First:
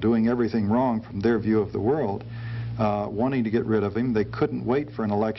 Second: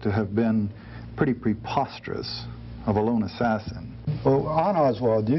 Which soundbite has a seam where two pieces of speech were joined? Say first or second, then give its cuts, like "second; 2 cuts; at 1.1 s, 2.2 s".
second; 1 cut; at 4.0 s